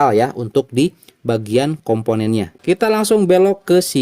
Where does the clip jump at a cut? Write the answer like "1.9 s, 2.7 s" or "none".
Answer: 2.5 s